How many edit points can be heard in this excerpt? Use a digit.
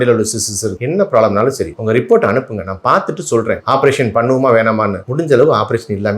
2